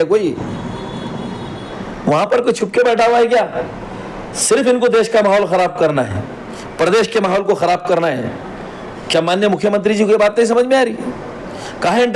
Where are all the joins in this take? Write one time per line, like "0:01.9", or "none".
none